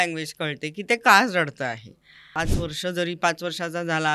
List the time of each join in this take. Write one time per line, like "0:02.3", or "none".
0:02.4